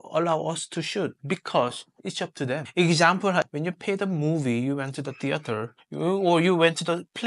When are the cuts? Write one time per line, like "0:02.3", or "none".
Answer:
0:02.7
0:03.4